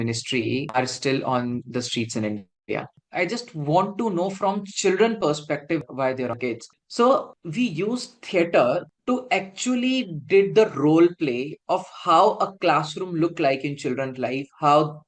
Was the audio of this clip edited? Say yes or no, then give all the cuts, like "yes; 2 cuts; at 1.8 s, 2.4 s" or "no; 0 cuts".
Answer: yes; 2 cuts; at 2.9 s, 6.4 s